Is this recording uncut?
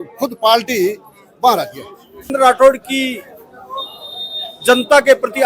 no; 1 cut; at 2.3 s

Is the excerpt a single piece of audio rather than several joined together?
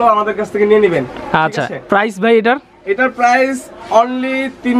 yes; 0 cuts

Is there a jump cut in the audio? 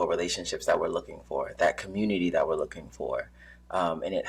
no; 0 cuts

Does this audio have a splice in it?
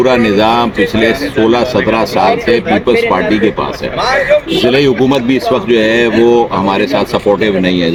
no; 0 cuts

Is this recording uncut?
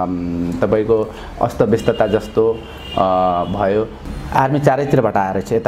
no; 1 cut; at 4.0 s

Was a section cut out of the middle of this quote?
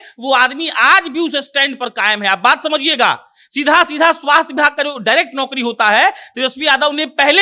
no; 0 cuts

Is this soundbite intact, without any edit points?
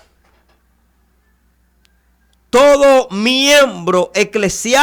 yes; 0 cuts

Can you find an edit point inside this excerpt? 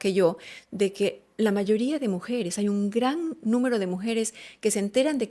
no; 0 cuts

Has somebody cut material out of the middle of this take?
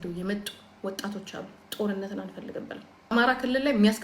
yes; 1 cut; at 3.1 s

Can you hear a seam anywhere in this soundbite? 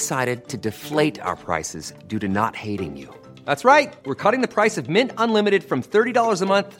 no; 0 cuts

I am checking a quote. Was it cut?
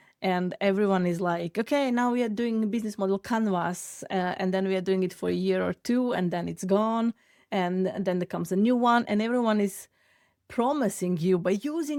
no; 0 cuts

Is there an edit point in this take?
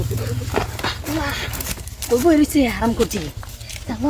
no; 0 cuts

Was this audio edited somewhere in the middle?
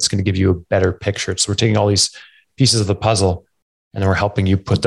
no; 0 cuts

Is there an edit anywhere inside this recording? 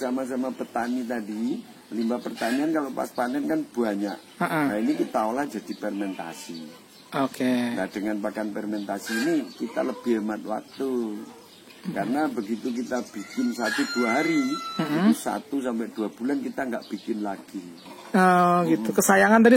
yes; 1 cut; at 17.8 s

